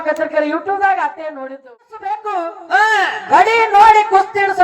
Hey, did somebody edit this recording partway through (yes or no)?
yes